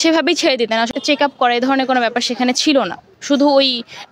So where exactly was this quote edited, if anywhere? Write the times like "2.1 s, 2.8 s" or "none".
0.9 s